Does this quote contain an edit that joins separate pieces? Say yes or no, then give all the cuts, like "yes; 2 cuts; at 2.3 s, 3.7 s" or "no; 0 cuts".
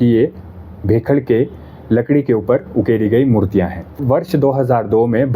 yes; 1 cut; at 4.0 s